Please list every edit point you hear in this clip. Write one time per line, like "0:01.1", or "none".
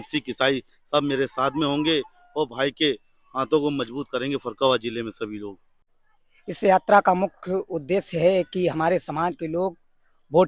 0:05.7